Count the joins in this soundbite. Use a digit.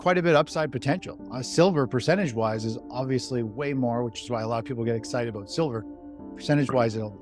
0